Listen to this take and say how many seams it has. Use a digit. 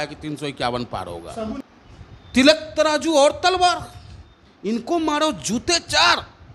1